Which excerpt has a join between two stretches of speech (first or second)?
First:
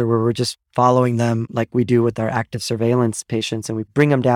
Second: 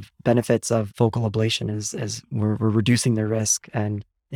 first